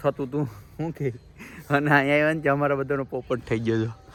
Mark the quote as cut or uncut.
uncut